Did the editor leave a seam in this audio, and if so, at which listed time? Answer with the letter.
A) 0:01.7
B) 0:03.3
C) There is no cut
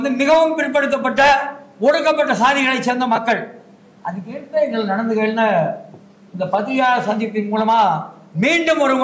C